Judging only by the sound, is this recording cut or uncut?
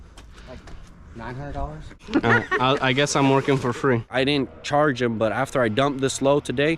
cut